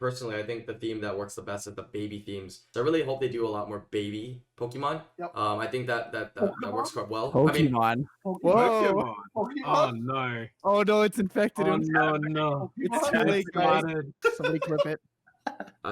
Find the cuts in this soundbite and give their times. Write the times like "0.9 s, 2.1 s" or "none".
2.6 s, 14.1 s